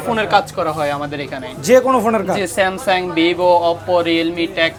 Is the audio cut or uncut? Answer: uncut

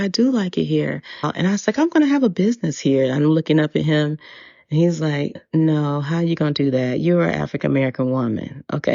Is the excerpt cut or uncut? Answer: cut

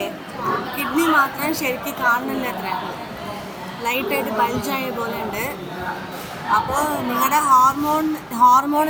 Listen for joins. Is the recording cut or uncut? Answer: uncut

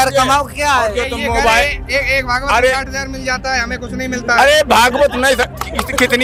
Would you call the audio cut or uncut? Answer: uncut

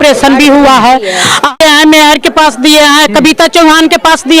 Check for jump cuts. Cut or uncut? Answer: cut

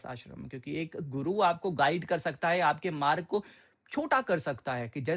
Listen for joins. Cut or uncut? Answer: uncut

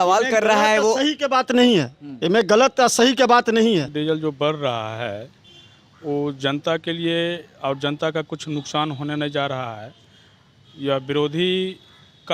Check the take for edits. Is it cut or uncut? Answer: cut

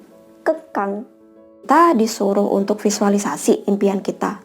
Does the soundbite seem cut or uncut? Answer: cut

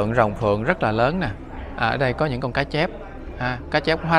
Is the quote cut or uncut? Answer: uncut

